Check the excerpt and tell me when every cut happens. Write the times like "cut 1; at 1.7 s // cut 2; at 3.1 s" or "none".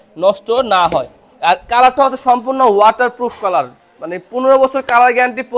none